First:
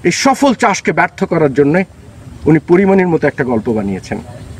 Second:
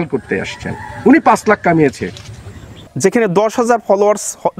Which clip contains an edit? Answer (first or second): second